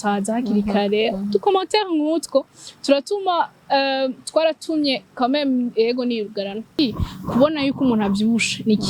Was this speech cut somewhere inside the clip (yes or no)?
yes